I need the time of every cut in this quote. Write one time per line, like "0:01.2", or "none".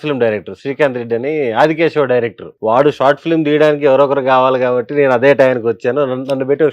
0:02.4